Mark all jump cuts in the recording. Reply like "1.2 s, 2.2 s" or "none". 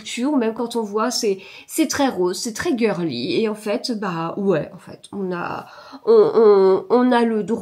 none